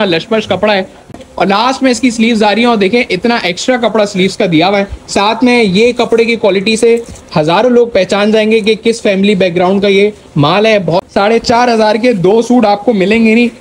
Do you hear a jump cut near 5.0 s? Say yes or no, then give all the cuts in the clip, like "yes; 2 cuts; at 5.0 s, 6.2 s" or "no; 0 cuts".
no; 2 cuts; at 1.1 s, 11.0 s